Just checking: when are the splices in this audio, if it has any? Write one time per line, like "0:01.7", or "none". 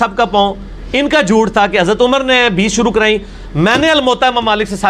none